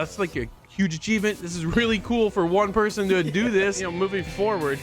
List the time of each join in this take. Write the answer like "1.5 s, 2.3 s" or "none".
3.8 s